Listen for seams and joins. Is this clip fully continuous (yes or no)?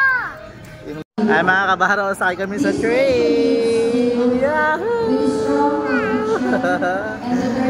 no